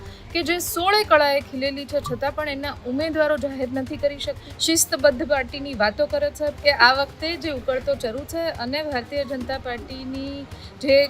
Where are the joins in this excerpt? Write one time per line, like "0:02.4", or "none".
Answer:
0:04.5
0:06.6